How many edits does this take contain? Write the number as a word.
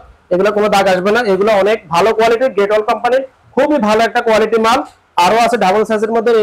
zero